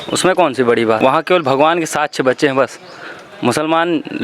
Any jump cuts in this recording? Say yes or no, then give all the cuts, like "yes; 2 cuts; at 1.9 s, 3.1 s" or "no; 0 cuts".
yes; 1 cut; at 1.0 s